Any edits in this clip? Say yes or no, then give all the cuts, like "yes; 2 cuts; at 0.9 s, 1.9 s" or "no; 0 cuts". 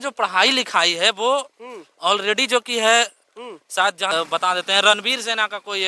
yes; 1 cut; at 4.1 s